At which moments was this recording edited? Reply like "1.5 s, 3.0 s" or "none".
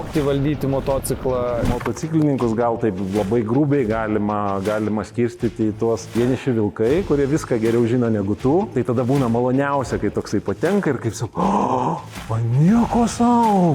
1.7 s, 6.1 s, 8.7 s